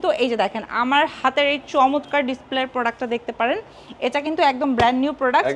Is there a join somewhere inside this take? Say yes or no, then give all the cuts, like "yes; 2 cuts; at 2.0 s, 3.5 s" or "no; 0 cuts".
no; 0 cuts